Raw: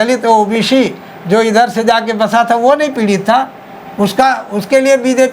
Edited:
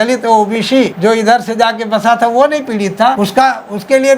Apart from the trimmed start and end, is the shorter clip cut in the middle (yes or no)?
yes